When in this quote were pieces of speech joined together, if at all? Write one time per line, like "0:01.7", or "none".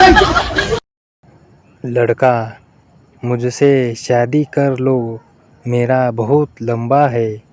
0:00.9